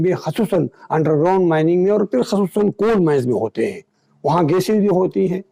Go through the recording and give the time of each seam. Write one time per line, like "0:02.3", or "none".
none